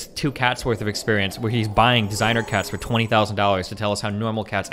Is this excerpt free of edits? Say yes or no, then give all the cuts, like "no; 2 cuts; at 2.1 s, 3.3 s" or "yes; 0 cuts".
yes; 0 cuts